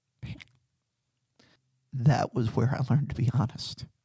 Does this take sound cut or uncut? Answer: cut